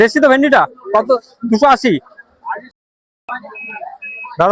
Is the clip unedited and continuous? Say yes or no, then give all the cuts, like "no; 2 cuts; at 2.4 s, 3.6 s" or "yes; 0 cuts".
no; 1 cut; at 2.8 s